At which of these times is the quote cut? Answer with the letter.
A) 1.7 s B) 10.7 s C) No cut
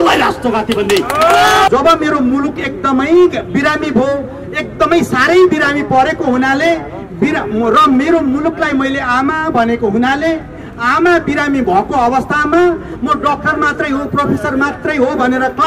A